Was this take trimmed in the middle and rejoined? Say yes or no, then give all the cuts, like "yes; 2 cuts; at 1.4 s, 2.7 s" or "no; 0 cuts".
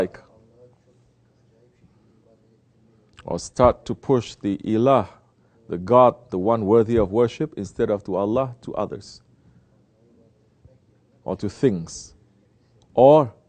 yes; 1 cut; at 6.3 s